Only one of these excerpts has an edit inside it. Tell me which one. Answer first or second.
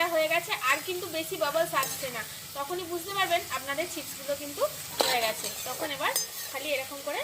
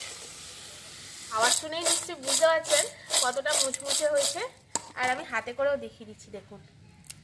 second